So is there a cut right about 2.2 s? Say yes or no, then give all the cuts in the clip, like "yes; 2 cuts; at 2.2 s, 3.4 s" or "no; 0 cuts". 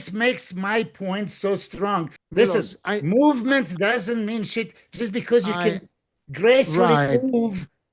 yes; 1 cut; at 2.2 s